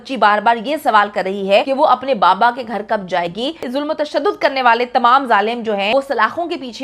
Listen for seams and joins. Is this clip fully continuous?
no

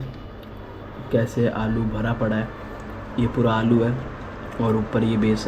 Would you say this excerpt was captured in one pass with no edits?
yes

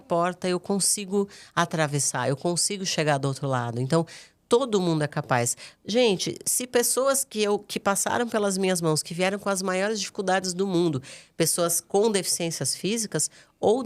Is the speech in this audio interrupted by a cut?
no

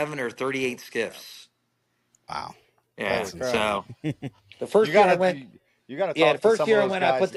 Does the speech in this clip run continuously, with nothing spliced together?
yes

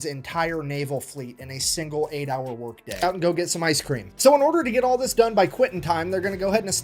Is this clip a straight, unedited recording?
no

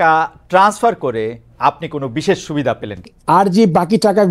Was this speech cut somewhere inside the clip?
yes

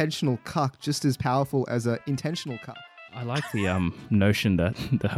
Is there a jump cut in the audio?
yes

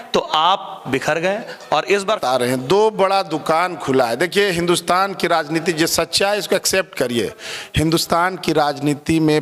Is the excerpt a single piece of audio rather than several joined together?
yes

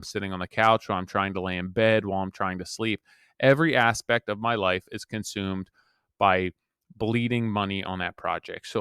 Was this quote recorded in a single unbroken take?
yes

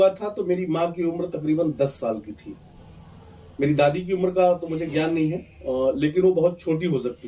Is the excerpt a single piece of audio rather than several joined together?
yes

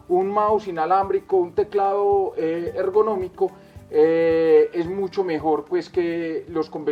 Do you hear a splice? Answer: no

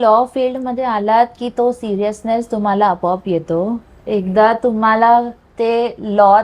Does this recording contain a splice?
no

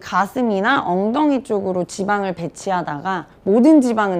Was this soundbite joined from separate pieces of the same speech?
yes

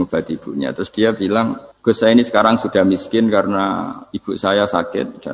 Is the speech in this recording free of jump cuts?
no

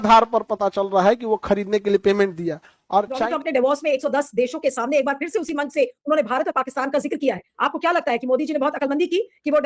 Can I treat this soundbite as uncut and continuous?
no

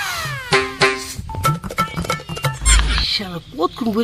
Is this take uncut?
no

